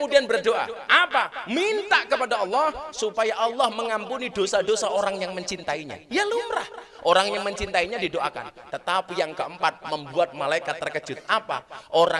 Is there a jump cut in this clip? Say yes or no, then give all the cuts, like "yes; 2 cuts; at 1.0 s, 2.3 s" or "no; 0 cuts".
no; 0 cuts